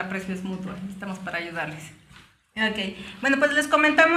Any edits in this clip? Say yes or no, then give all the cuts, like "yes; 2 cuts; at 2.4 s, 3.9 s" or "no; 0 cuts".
no; 0 cuts